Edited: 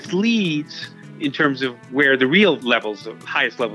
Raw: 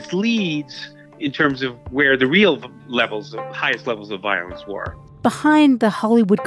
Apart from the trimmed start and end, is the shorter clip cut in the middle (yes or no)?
yes